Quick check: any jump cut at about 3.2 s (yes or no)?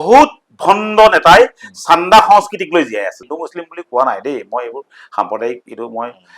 yes